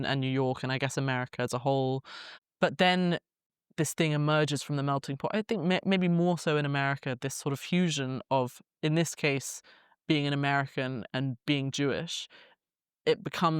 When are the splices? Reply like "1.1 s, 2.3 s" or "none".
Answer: 9.9 s